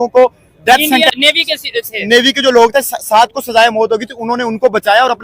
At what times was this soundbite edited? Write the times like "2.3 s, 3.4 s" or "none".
1.1 s